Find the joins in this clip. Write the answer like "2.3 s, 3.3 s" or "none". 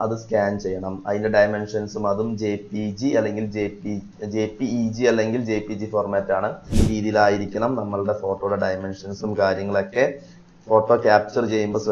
6.7 s

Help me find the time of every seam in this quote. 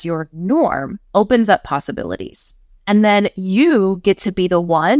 0.9 s

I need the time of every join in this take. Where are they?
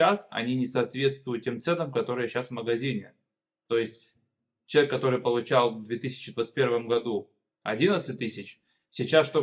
none

